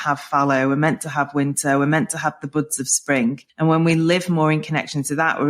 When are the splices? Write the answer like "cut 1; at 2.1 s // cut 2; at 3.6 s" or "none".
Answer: cut 1; at 3.5 s